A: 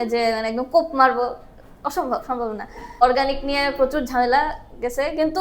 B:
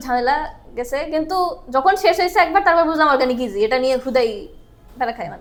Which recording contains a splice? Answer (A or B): A